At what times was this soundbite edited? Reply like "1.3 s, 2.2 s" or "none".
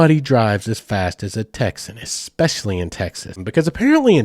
3.3 s